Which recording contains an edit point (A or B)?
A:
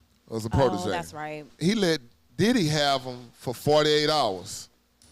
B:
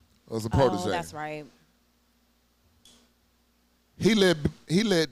A